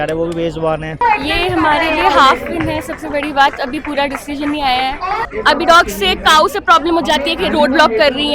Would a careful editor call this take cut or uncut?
cut